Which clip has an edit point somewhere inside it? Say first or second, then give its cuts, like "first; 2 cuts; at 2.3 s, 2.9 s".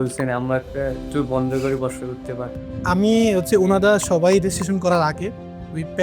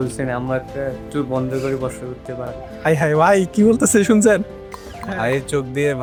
first; 1 cut; at 2.6 s